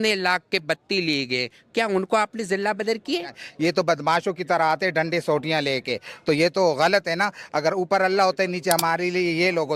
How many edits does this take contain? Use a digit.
1